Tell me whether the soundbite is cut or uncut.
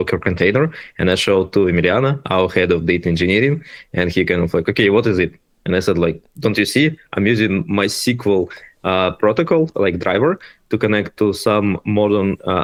uncut